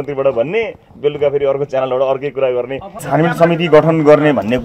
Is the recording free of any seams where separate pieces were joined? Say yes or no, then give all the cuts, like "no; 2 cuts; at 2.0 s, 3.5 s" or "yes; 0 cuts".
no; 1 cut; at 3.0 s